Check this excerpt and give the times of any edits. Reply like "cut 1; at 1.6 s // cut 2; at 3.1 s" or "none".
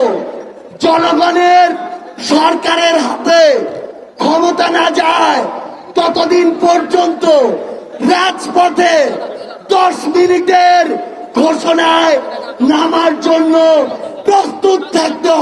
none